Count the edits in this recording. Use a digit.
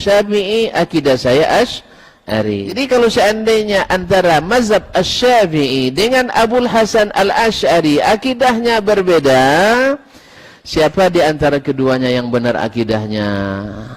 1